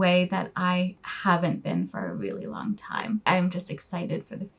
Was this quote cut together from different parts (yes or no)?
yes